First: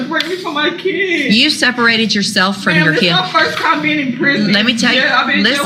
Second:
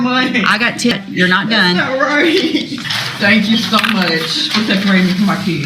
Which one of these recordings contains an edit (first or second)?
second